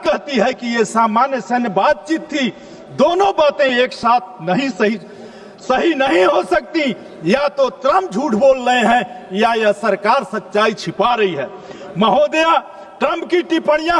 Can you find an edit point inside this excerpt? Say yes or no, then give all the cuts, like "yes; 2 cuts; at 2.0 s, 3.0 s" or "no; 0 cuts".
no; 0 cuts